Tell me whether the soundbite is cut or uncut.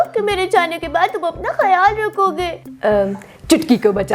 cut